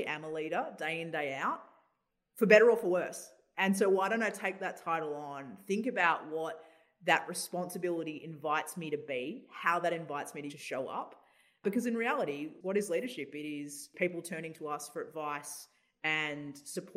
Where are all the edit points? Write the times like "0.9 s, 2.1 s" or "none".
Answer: 10.5 s, 11.6 s, 12.5 s, 13.9 s

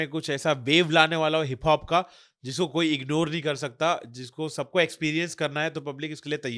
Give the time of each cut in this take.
none

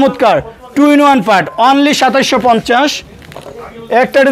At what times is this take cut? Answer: none

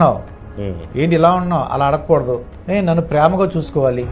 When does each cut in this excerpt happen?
2.5 s

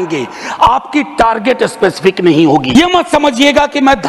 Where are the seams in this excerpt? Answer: 2.7 s

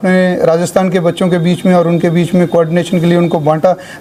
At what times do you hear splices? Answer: none

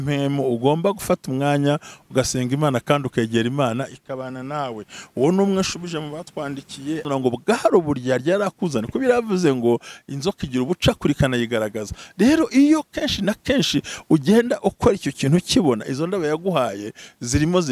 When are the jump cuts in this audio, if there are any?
7.0 s

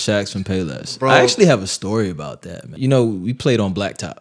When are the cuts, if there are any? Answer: 2.7 s

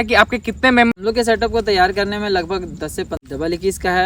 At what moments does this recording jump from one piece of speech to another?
0.9 s, 3.2 s

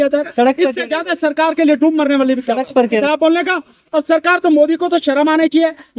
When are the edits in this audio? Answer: 3.0 s

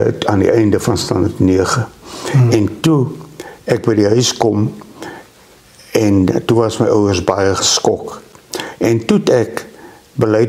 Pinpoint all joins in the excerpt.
8.2 s

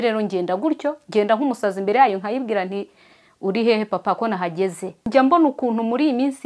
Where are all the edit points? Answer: 5.0 s

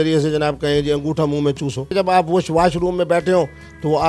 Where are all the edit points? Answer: 1.9 s

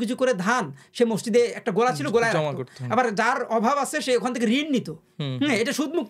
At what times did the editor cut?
none

